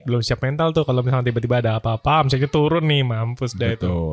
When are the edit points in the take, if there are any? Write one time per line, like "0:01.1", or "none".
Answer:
none